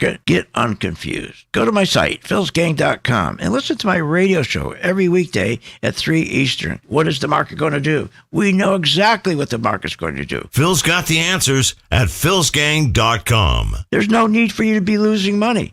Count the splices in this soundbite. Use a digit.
0